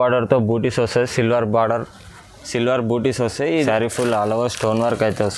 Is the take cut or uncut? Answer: cut